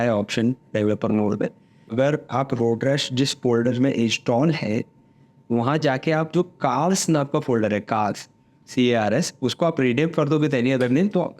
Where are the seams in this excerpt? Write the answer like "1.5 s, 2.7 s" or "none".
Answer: 1.9 s